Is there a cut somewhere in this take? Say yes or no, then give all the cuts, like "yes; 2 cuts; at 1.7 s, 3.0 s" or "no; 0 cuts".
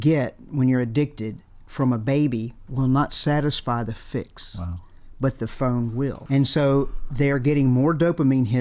yes; 1 cut; at 6.2 s